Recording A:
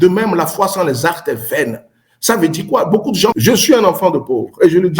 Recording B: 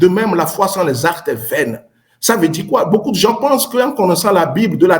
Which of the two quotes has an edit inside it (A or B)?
A